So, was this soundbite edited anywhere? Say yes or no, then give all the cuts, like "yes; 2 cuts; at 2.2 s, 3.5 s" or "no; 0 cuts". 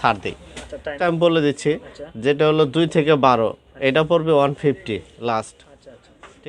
yes; 1 cut; at 1.0 s